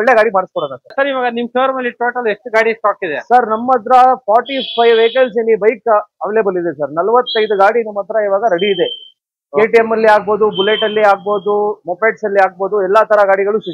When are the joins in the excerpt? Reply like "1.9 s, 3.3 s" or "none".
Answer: 0.9 s